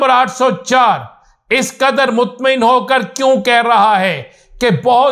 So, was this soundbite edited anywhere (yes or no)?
no